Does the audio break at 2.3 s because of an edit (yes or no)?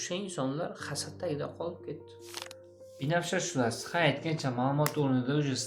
yes